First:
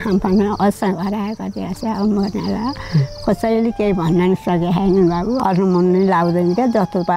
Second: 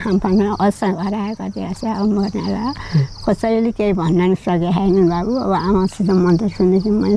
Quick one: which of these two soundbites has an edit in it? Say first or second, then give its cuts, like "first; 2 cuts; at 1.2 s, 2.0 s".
first; 1 cut; at 5.4 s